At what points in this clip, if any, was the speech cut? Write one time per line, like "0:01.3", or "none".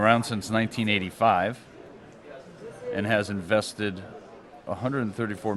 0:03.5